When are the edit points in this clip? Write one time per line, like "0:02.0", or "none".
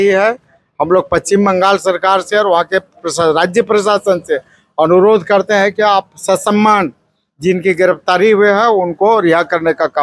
none